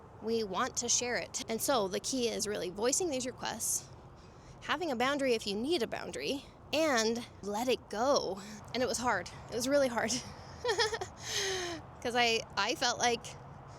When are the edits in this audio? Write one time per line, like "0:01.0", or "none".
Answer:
0:01.3
0:06.5
0:07.4
0:08.5